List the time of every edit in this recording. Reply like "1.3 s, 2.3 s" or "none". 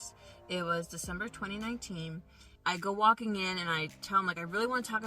2.4 s